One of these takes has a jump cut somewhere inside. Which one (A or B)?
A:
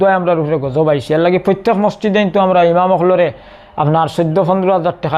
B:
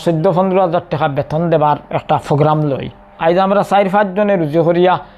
B